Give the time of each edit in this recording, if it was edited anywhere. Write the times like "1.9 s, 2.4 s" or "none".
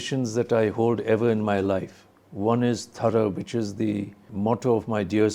4.2 s